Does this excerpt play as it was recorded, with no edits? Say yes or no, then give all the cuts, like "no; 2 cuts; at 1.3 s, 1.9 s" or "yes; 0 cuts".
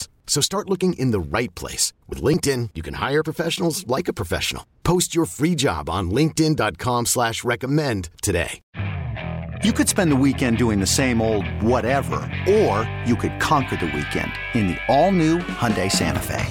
no; 1 cut; at 8.6 s